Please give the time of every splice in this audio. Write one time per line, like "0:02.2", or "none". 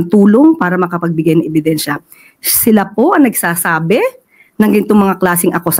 none